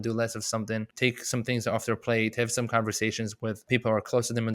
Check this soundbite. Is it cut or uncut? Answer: cut